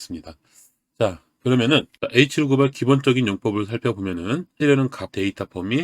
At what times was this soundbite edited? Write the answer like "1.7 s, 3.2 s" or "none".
4.6 s